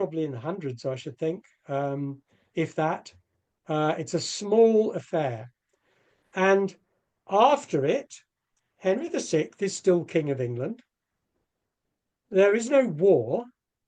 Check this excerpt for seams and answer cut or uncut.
uncut